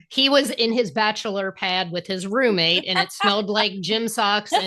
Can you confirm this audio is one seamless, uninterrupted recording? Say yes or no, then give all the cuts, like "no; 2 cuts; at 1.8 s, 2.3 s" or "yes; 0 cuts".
yes; 0 cuts